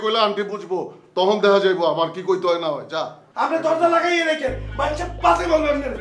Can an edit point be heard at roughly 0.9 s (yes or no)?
no